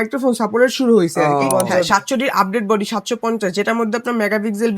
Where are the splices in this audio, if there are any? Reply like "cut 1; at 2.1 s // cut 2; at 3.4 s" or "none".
cut 1; at 1.5 s